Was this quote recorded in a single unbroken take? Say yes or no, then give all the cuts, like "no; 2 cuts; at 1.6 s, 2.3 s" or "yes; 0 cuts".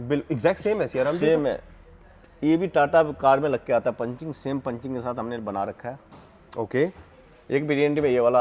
yes; 0 cuts